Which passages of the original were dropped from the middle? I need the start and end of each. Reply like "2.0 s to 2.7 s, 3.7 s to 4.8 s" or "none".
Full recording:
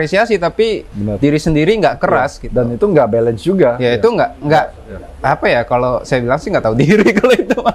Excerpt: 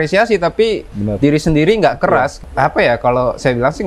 2.4 s to 5.1 s